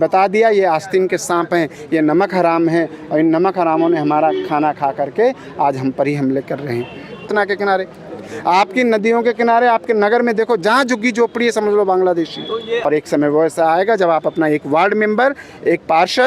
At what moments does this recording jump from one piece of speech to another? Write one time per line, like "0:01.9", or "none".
0:07.2
0:12.8